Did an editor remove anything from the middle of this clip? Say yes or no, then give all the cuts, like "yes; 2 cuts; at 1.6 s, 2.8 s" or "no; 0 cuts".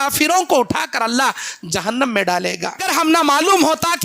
yes; 1 cut; at 2.8 s